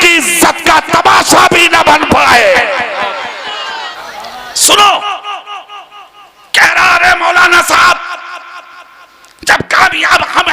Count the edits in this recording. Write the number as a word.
one